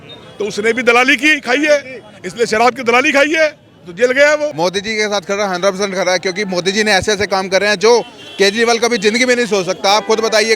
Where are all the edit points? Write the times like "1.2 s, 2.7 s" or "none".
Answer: 4.5 s